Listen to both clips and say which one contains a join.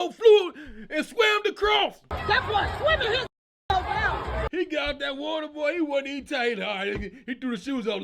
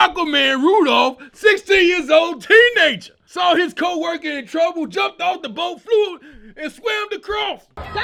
first; 1 cut; at 4.5 s

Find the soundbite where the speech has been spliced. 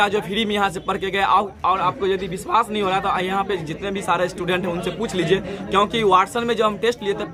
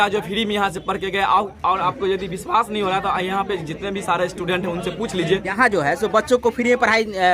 second; 1 cut; at 5.5 s

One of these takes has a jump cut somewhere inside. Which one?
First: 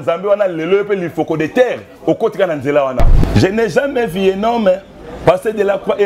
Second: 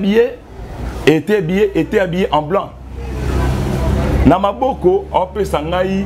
first; 1 cut; at 3.1 s

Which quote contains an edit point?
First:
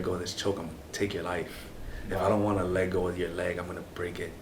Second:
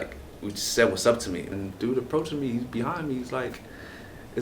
second; 1 cut; at 1.5 s

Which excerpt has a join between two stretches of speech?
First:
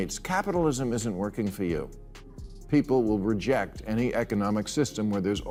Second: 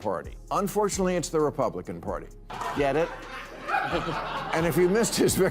second; 1 cut; at 2.4 s

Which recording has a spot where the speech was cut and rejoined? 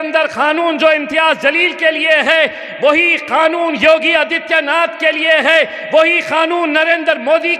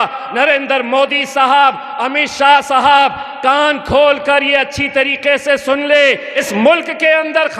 second; 1 cut; at 6.3 s

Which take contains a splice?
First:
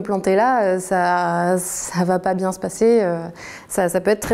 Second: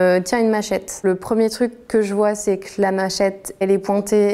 second; 2 cuts; at 0.9 s, 3.6 s

